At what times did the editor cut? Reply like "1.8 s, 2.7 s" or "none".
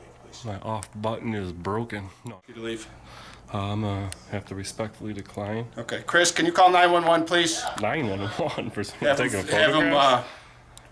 2.2 s